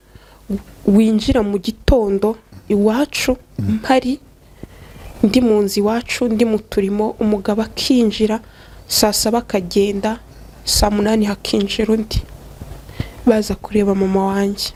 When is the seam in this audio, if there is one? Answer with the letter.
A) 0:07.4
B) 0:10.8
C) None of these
C